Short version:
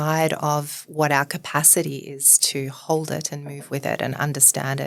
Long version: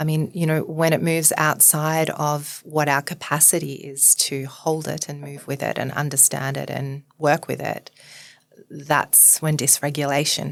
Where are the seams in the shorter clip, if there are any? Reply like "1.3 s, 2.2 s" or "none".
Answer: none